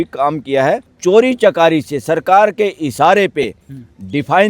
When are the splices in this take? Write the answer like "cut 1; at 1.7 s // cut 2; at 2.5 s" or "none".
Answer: cut 1; at 0.9 s